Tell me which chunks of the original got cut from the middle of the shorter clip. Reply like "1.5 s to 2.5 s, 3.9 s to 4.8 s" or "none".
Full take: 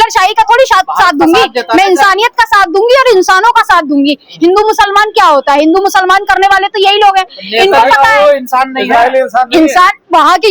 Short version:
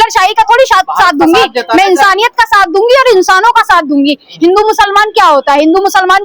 none